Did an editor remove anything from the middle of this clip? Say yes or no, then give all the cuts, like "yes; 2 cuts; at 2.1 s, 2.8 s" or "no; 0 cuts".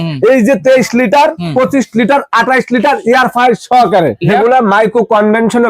yes; 1 cut; at 4.2 s